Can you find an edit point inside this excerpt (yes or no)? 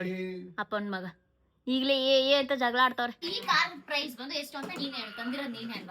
yes